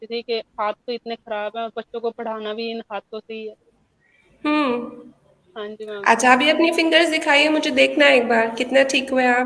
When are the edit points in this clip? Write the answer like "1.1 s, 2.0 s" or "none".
none